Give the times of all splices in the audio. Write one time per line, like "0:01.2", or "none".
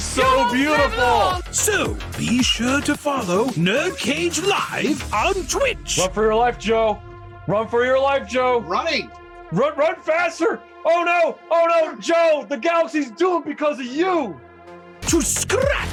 none